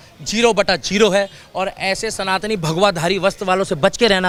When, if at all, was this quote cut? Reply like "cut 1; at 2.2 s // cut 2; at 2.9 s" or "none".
none